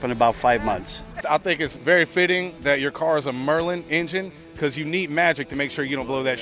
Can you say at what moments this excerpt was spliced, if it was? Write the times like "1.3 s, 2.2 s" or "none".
1.5 s, 2.5 s